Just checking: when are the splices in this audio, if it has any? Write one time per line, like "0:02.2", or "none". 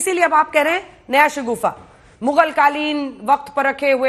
none